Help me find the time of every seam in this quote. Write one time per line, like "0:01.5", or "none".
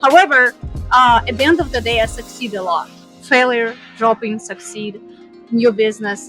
0:03.0